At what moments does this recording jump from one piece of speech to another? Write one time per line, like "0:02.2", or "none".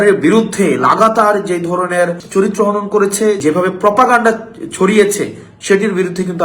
0:02.2
0:03.4